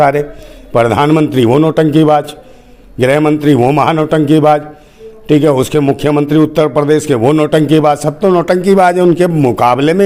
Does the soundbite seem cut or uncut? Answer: uncut